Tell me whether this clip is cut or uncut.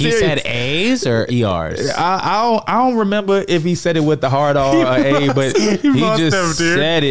uncut